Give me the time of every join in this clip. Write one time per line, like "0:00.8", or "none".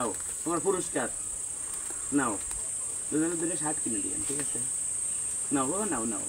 none